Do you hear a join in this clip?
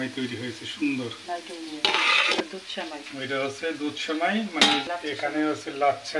yes; 2 cuts; at 2.4 s, 4.8 s

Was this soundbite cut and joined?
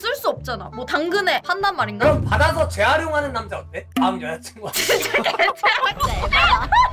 no; 0 cuts

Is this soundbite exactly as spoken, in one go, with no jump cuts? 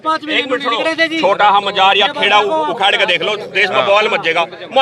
yes; 0 cuts

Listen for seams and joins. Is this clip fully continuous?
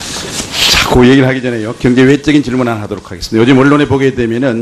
no; 1 cut; at 1.3 s

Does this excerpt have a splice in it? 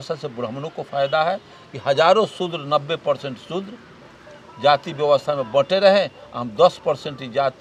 no; 0 cuts

